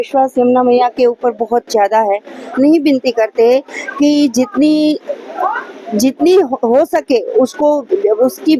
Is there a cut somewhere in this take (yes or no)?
yes